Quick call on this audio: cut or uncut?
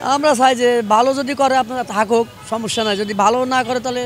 uncut